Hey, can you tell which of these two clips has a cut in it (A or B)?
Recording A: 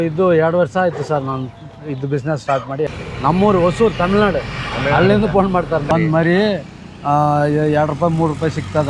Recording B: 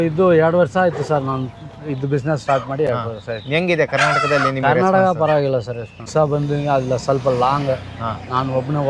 A